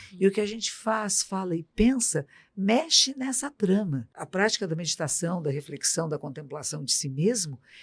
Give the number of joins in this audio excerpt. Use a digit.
1